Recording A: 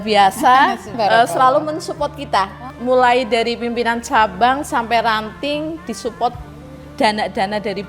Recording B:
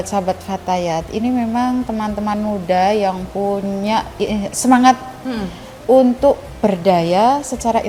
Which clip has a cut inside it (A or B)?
A